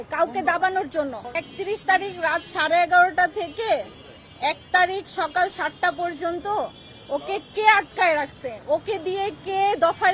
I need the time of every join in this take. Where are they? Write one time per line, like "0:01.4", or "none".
0:01.4